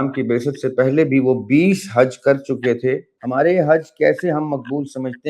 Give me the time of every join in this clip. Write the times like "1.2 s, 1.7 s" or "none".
3.1 s